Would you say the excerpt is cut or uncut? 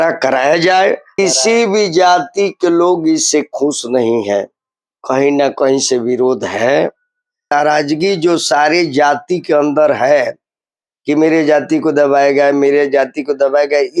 cut